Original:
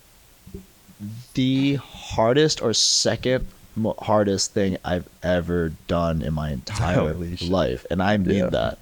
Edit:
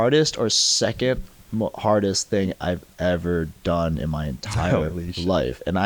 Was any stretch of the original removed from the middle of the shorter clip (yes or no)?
no